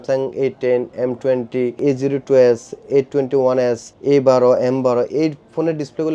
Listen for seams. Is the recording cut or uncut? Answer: cut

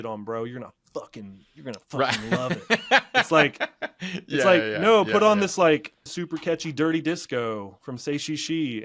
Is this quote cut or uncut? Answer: cut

